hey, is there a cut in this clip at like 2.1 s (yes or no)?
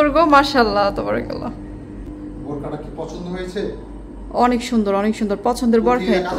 yes